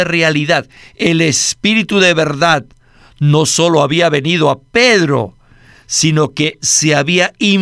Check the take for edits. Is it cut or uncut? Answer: uncut